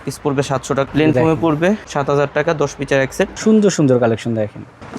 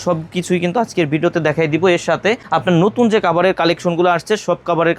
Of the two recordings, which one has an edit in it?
first; 2 cuts; at 0.8 s, 3.3 s

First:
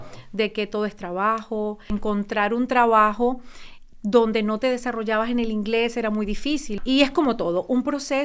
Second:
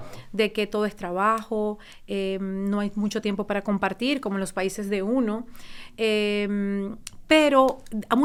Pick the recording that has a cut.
first; 2 cuts; at 1.9 s, 6.7 s

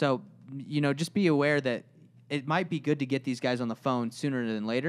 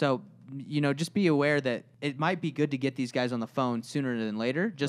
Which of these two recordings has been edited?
second; 1 cut; at 1.9 s

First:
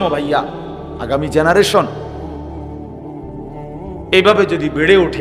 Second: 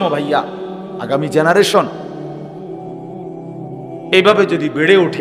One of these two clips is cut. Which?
second; 2 cuts; at 1.9 s, 4.1 s

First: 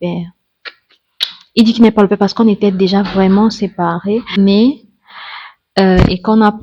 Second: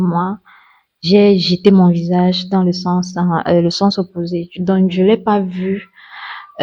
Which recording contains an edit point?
first; 1 cut; at 4.4 s

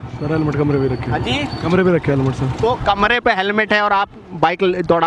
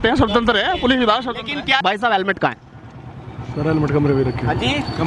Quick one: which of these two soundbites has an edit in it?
second; 1 cut; at 1.8 s

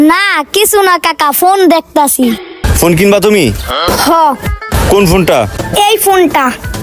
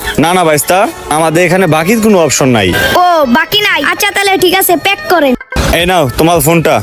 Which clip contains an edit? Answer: second; 1 cut; at 5.3 s

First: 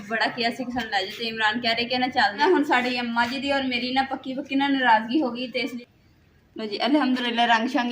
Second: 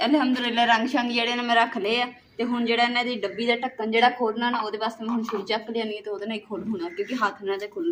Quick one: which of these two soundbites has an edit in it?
first; 2 cuts; at 2.4 s, 5.8 s

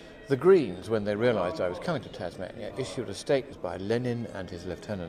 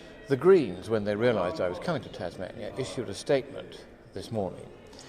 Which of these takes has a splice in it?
second; 1 cut; at 3.5 s

